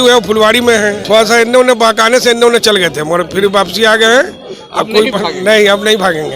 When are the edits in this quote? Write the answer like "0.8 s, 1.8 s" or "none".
1.0 s